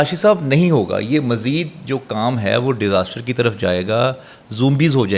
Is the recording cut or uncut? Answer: uncut